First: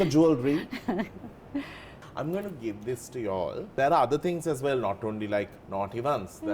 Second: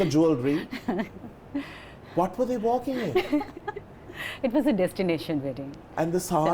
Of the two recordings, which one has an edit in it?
first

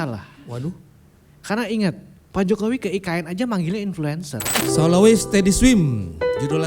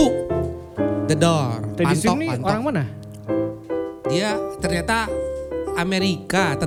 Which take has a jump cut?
first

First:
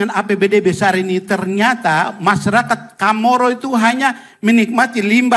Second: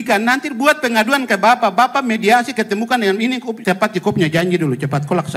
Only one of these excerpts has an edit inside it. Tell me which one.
second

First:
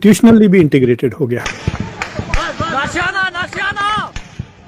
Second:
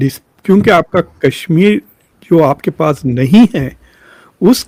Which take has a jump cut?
first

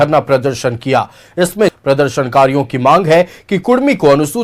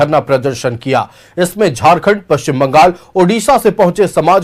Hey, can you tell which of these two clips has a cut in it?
first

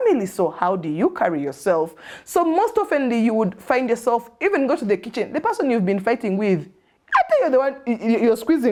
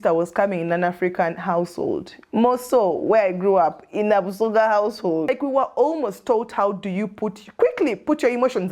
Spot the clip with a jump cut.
second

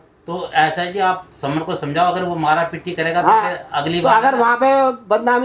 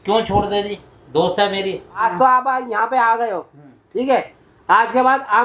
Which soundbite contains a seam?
second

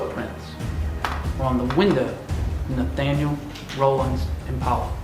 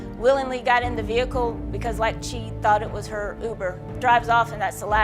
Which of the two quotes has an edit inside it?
second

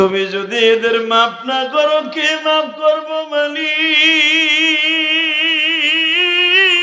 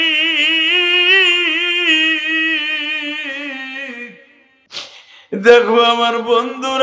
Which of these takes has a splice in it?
second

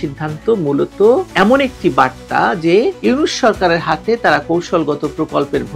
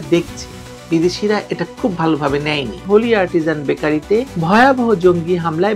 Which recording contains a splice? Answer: second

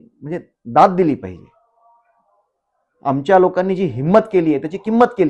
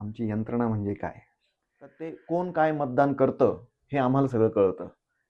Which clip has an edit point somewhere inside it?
second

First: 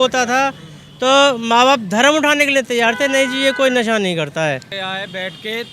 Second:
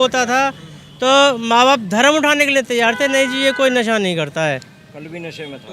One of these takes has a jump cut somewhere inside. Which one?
first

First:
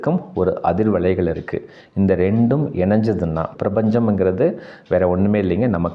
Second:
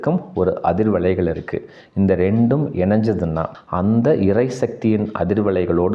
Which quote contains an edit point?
second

